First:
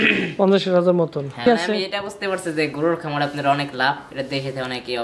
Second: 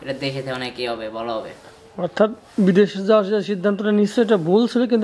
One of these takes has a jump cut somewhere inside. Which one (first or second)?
first